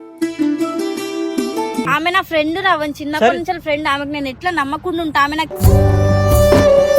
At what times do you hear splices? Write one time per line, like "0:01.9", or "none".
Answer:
0:01.9